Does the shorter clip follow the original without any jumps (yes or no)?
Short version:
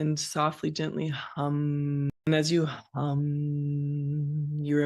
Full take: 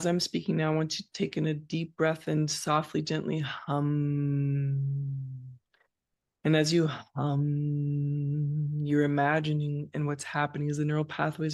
no